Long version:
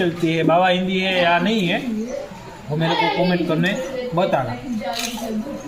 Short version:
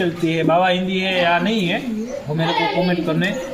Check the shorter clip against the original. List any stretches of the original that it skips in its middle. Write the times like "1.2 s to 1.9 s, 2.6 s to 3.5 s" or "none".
2.2 s to 2.6 s